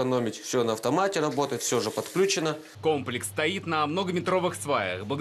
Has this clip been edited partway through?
no; 0 cuts

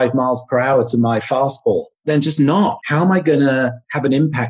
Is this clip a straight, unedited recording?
no; 2 cuts; at 2.0 s, 2.8 s

